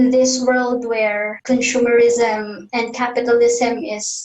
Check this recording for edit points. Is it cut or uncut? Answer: cut